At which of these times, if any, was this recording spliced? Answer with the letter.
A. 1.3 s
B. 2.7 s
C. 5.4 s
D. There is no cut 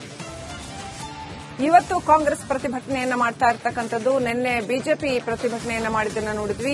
A